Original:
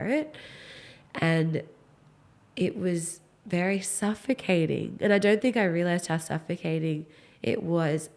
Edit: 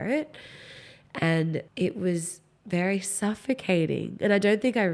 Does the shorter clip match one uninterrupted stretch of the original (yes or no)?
no